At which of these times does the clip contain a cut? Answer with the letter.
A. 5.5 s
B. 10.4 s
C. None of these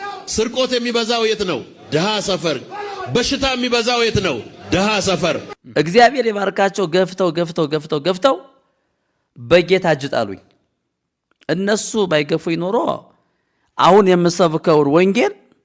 A